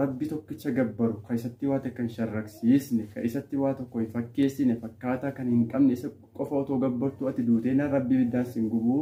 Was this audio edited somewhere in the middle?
no; 0 cuts

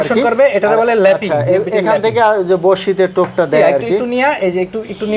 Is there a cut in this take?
no; 0 cuts

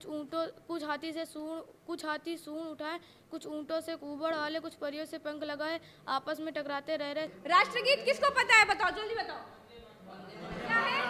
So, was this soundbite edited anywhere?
yes; 1 cut; at 7.4 s

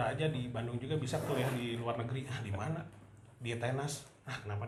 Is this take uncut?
yes; 0 cuts

